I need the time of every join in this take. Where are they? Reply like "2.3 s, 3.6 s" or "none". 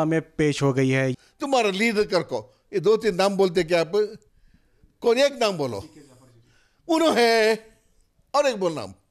1.1 s